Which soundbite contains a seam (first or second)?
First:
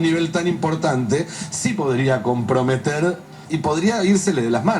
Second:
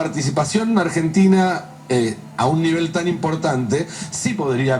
first